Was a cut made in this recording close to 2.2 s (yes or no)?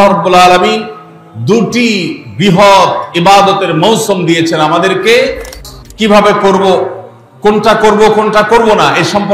no